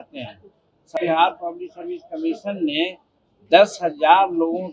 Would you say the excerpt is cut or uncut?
cut